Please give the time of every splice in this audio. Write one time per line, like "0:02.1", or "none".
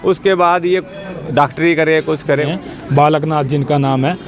0:02.5